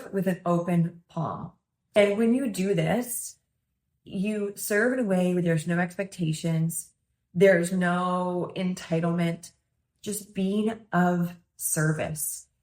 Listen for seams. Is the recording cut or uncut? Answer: cut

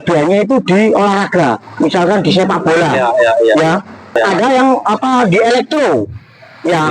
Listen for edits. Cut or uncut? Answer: cut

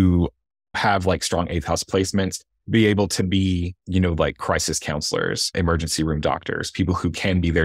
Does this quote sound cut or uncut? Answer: cut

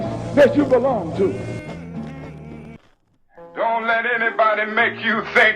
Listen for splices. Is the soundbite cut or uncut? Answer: cut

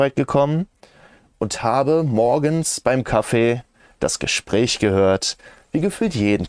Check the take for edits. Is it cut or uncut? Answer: uncut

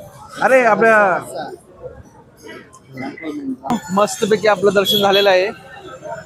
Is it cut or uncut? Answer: cut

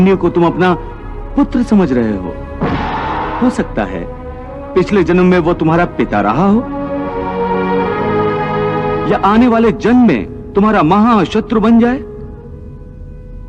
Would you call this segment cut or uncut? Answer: cut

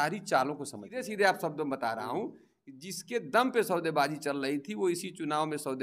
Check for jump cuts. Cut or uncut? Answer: cut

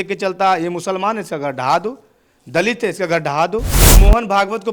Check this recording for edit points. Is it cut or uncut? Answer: cut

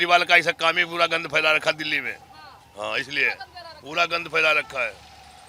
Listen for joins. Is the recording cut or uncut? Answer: uncut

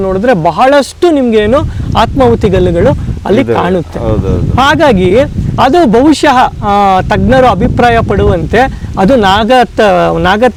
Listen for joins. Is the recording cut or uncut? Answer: uncut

